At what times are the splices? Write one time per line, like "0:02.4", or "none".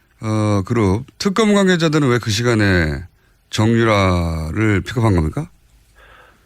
none